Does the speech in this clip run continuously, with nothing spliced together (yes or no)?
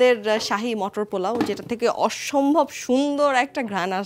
yes